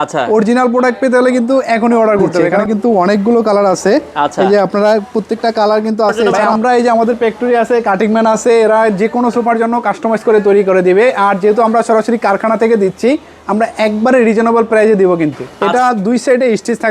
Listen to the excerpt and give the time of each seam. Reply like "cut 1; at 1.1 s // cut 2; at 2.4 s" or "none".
cut 1; at 2.6 s // cut 2; at 6.4 s // cut 3; at 15.5 s

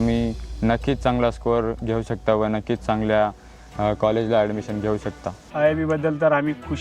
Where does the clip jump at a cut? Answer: cut 1; at 5.4 s

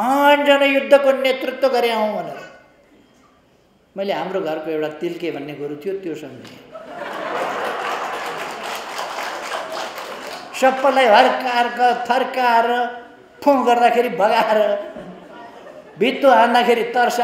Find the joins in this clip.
cut 1; at 10.3 s

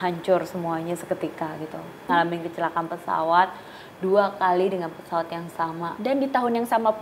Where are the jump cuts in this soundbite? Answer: cut 1; at 2.1 s

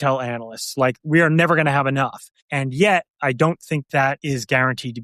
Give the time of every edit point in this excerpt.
cut 1; at 1.0 s // cut 2; at 4.1 s

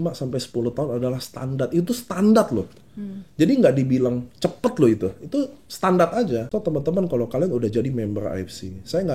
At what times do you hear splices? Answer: cut 1; at 6.5 s

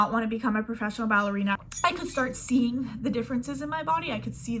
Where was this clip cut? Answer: cut 1; at 1.6 s

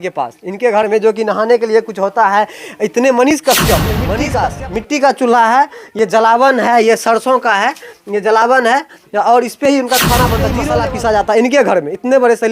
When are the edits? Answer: cut 1; at 4.1 s // cut 2; at 10.6 s

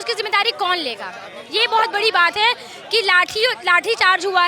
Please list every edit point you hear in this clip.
none

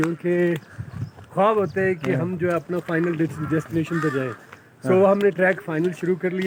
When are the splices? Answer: none

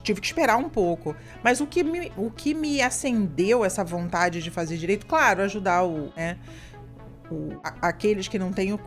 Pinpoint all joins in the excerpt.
cut 1; at 6.1 s // cut 2; at 7.6 s

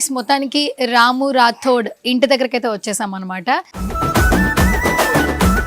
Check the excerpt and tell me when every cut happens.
cut 1; at 3.8 s

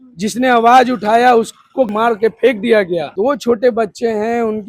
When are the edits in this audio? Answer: cut 1; at 3.1 s

